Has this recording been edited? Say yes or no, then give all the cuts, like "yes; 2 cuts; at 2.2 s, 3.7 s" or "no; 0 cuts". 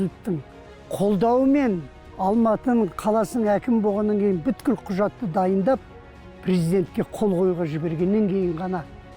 yes; 2 cuts; at 2.1 s, 3.0 s